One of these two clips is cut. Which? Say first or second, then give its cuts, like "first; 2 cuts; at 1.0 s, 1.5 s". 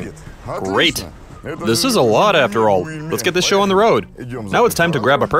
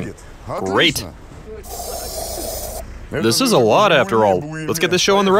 first; 2 cuts; at 1.6 s, 4.4 s